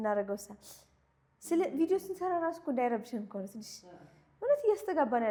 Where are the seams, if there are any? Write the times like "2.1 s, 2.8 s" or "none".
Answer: none